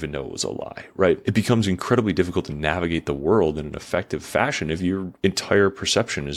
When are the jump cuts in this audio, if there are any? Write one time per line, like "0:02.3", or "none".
0:01.2
0:05.1